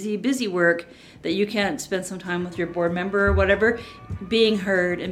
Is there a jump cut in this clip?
yes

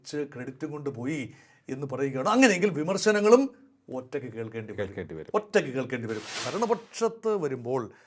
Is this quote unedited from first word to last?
no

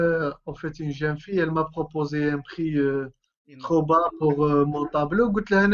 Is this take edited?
no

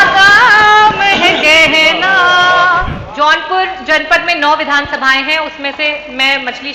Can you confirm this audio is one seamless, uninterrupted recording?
no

